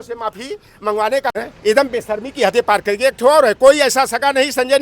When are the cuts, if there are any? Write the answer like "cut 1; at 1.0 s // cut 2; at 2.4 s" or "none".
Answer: cut 1; at 1.4 s